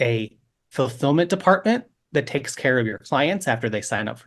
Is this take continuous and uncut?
yes; 0 cuts

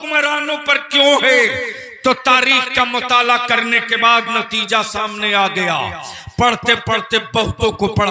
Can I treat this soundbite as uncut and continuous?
yes; 0 cuts

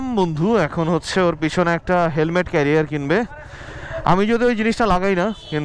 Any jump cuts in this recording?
no; 0 cuts

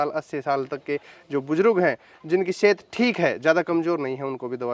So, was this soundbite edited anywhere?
no; 0 cuts

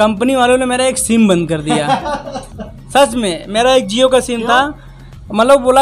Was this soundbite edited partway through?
no; 0 cuts

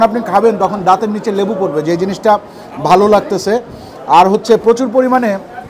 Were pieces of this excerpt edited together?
no; 0 cuts

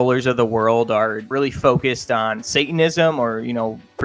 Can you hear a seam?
yes; 1 cut; at 1.2 s

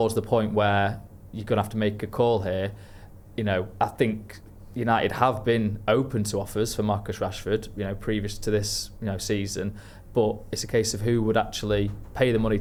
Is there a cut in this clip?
no; 0 cuts

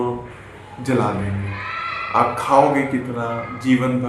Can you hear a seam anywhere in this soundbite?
no; 0 cuts

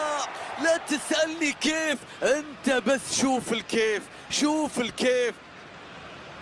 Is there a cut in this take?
yes; 1 cut; at 5.4 s

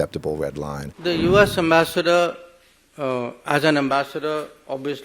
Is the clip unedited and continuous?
no; 1 cut; at 1.1 s

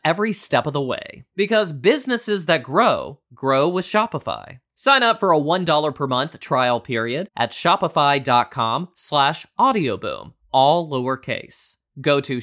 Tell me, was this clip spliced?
no; 0 cuts

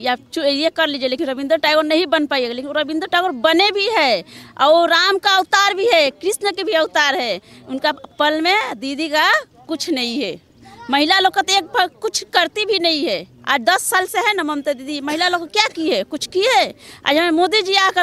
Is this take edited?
no; 0 cuts

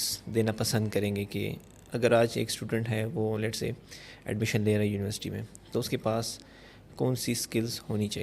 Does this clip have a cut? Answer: no; 0 cuts

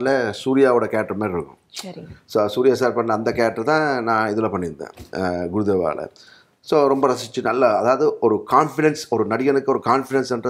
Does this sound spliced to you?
no; 0 cuts

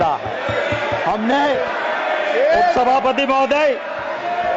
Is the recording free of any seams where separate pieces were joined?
yes; 0 cuts

